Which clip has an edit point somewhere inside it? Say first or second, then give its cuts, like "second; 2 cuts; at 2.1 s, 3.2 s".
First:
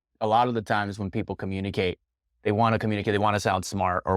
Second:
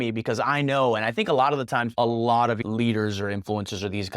second; 2 cuts; at 1.9 s, 2.6 s